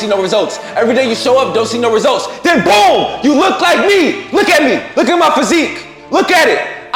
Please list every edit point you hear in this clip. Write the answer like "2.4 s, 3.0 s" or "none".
none